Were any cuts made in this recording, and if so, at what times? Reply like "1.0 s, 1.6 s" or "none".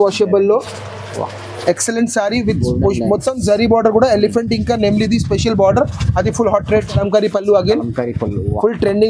7.0 s

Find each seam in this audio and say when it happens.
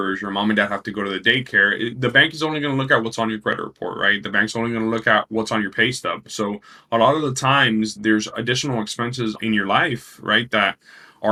none

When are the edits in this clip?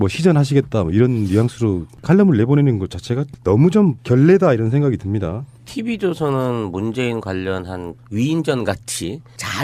none

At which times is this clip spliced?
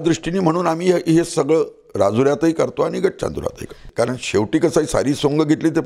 3.8 s

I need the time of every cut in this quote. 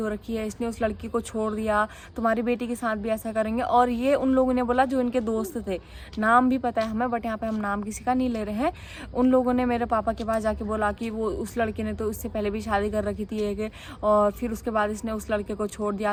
none

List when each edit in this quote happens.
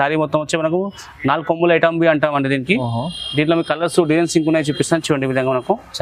none

